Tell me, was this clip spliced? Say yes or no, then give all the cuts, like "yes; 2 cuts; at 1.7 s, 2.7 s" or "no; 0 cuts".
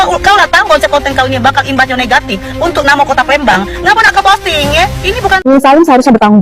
yes; 1 cut; at 5.4 s